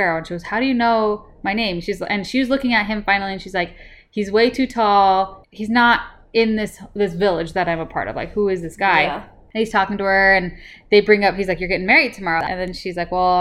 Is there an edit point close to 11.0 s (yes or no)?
no